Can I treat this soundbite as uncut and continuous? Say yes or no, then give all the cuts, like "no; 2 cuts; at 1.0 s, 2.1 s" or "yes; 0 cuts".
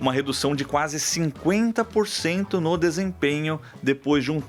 yes; 0 cuts